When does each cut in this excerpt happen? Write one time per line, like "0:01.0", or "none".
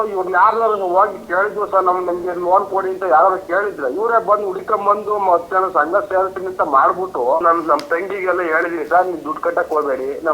0:07.4